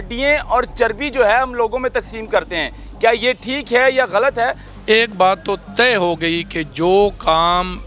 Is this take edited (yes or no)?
yes